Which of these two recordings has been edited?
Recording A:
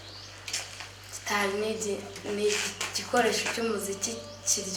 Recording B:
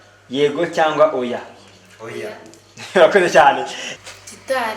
B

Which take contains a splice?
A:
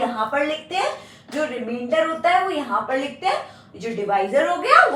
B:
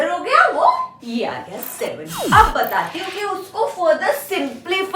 B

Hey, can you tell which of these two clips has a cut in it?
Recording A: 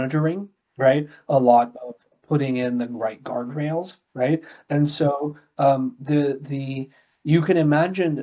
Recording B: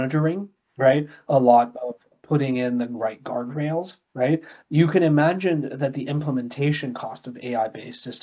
B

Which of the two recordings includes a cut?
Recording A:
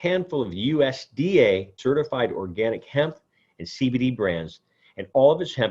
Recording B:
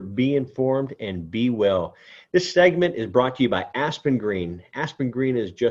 A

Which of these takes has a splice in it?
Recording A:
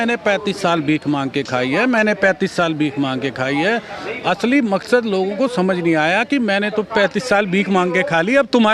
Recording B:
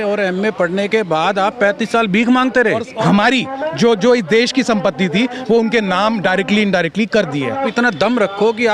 B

